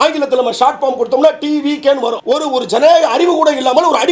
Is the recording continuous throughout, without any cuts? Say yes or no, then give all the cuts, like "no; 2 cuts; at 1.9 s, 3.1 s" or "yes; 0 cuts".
no; 1 cut; at 2.2 s